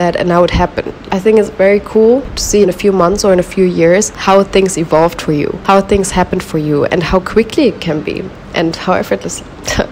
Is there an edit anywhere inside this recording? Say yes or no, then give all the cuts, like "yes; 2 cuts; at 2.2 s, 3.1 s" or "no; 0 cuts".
yes; 4 cuts; at 1.1 s, 2.5 s, 4.1 s, 5.6 s